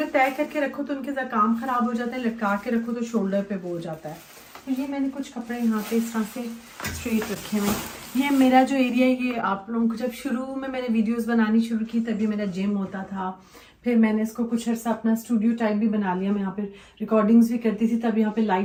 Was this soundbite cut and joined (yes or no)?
no